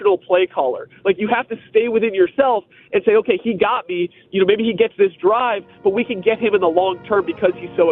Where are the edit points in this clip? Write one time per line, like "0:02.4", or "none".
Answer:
none